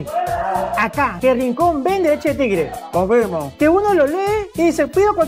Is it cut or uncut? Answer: cut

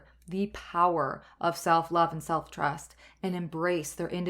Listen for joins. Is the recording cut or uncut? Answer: uncut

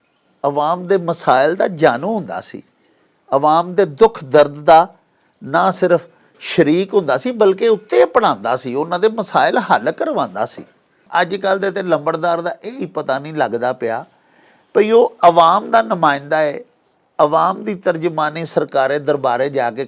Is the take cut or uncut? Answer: cut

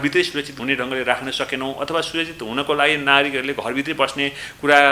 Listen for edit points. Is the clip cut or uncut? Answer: uncut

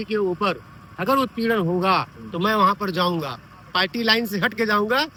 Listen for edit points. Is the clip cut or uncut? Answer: uncut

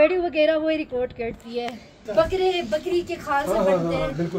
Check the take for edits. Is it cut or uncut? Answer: cut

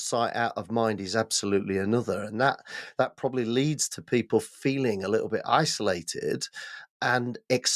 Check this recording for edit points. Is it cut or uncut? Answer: uncut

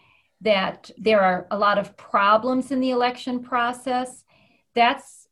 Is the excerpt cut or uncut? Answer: uncut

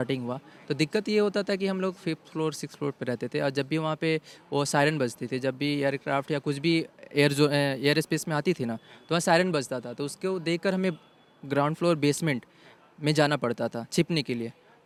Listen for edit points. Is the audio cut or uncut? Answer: uncut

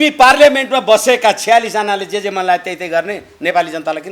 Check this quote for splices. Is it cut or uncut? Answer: uncut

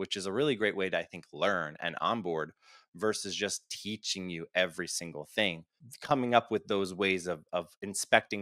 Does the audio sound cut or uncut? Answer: cut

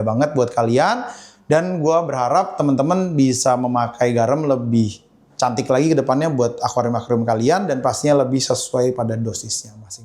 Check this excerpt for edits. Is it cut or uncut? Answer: uncut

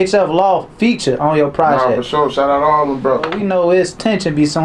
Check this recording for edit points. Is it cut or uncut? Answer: cut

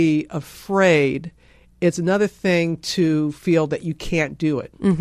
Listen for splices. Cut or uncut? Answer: uncut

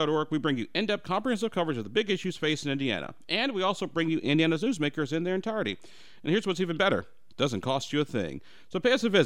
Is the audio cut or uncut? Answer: uncut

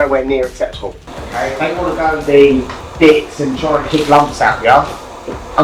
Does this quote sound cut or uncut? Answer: cut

